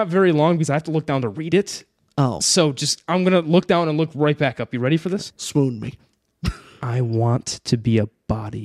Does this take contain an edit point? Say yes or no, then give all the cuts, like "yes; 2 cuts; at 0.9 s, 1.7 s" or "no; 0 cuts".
yes; 1 cut; at 5.4 s